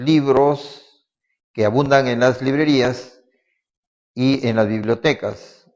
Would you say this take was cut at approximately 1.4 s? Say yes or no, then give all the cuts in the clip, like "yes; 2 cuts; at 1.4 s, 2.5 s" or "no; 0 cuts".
no; 0 cuts